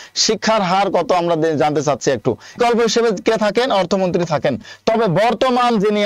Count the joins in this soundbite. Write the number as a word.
one